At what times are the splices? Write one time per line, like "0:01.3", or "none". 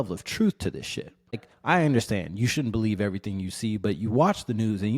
0:01.5